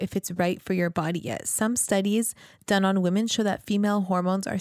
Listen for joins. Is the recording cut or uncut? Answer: uncut